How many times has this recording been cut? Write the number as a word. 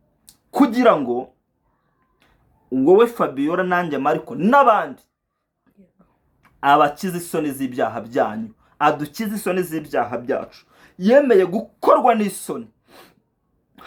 zero